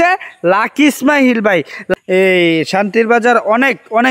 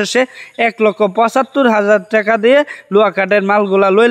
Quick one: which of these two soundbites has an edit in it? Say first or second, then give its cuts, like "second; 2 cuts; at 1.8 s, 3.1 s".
first; 1 cut; at 1.9 s